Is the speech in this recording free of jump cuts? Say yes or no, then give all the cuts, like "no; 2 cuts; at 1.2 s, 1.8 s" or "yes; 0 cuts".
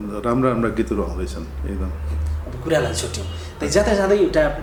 yes; 0 cuts